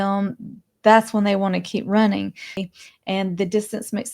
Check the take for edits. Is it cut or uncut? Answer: cut